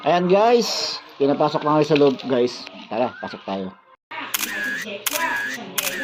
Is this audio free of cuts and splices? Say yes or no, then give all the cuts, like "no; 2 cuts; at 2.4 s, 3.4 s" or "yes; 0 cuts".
yes; 0 cuts